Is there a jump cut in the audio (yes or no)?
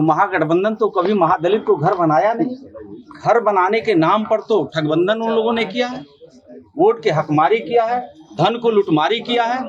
no